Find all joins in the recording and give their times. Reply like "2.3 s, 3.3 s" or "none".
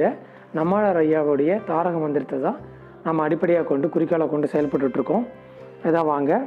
none